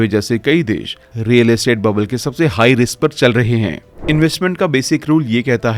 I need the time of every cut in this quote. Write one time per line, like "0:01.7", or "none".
0:03.9